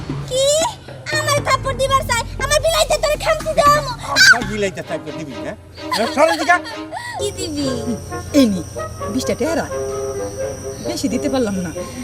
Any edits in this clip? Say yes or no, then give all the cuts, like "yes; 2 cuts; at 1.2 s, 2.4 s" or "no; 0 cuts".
yes; 1 cut; at 7.2 s